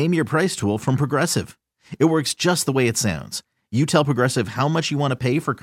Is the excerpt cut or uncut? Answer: uncut